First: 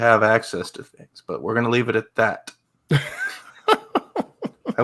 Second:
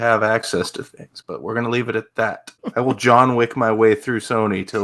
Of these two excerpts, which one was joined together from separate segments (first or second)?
second